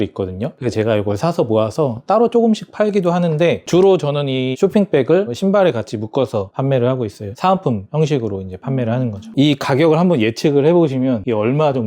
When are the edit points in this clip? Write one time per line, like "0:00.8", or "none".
0:09.2